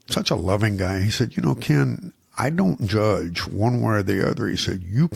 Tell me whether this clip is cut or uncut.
uncut